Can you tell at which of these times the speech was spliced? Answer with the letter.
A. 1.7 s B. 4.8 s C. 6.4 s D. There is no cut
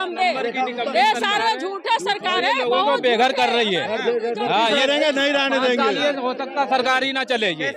B